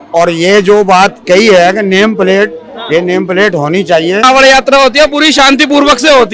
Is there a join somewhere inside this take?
yes; 1 cut; at 4.2 s

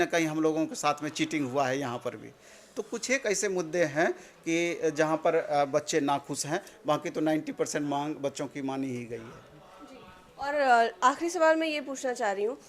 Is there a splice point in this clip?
no; 0 cuts

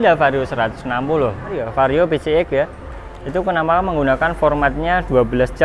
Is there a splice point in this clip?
yes; 1 cut; at 1.7 s

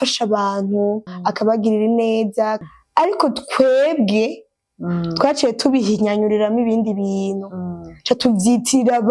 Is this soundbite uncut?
no; 2 cuts; at 1.1 s, 2.6 s

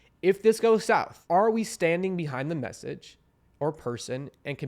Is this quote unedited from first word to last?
no; 1 cut; at 1.1 s

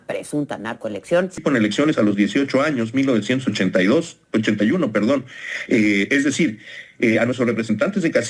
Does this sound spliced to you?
yes; 1 cut; at 1.4 s

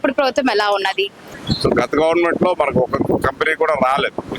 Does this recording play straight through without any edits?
no; 1 cut; at 1.3 s

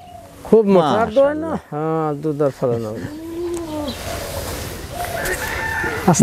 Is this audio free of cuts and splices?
yes; 0 cuts

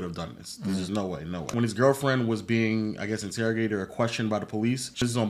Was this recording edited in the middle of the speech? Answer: no; 0 cuts

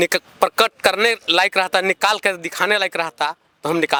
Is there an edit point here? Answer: no; 0 cuts

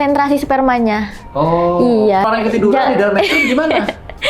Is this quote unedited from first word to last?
no; 1 cut; at 2.3 s

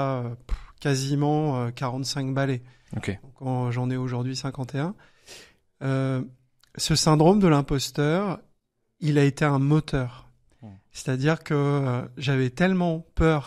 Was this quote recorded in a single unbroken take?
yes; 0 cuts

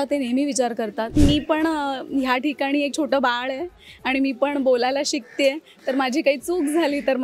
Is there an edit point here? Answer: yes; 1 cut; at 1.2 s

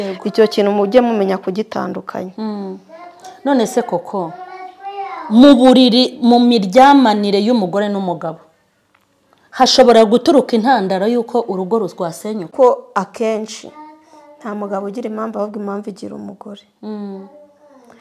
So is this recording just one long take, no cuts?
no; 1 cut; at 12.5 s

